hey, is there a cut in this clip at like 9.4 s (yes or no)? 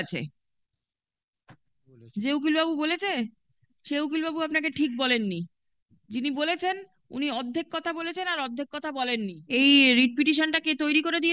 yes